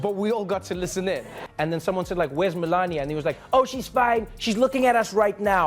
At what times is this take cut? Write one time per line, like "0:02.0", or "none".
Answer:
0:01.4

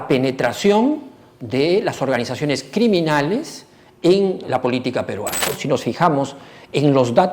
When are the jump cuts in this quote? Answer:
0:04.4
0:05.6

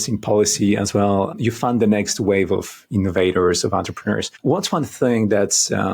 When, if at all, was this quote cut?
0:01.3
0:04.3

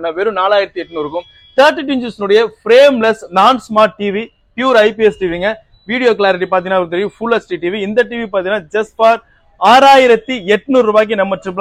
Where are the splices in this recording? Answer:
none

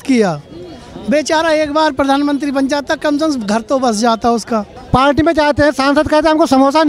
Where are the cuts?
0:04.8

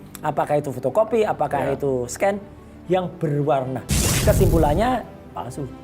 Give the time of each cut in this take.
0:04.1

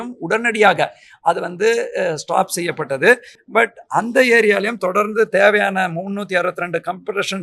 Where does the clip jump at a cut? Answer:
none

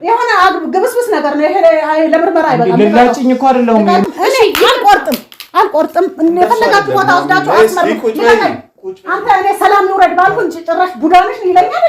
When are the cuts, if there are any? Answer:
0:04.0

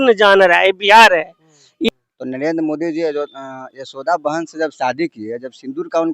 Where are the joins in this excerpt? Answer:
0:01.9

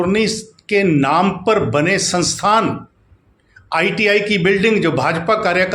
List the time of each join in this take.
none

